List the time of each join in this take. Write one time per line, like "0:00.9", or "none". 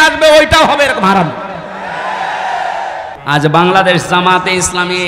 0:03.1